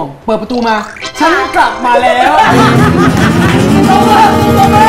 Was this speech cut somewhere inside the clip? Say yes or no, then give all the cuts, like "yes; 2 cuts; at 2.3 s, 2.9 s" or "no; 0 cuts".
no; 0 cuts